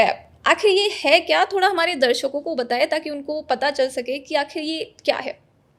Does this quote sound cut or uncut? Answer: uncut